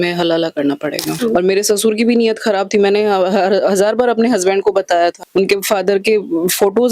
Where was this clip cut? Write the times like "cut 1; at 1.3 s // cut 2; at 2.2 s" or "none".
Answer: cut 1; at 1.1 s